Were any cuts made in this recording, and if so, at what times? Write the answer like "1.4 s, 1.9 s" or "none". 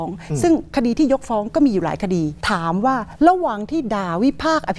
2.4 s